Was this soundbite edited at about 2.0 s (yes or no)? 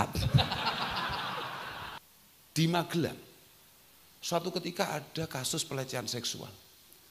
yes